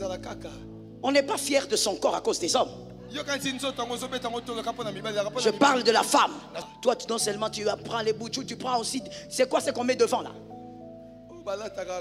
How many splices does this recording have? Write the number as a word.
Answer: one